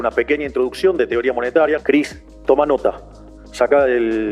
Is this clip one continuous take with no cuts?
no; 1 cut; at 1.8 s

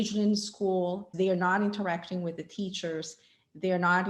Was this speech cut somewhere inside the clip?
yes; 1 cut; at 1.1 s

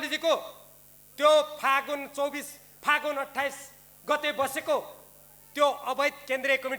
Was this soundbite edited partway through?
no; 0 cuts

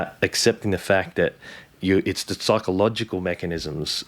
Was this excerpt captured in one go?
yes; 0 cuts

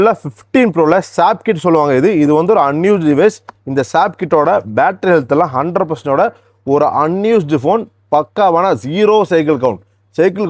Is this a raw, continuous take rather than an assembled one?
yes; 0 cuts

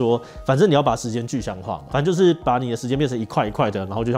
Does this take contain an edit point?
no; 0 cuts

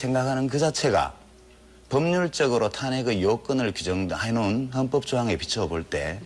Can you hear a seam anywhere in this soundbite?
no; 0 cuts

